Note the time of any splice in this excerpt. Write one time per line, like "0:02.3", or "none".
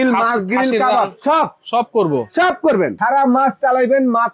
0:03.0